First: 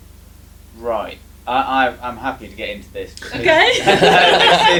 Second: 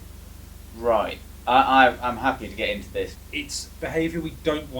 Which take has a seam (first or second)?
second